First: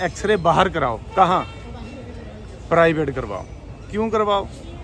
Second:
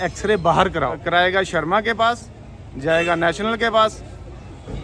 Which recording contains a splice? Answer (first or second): second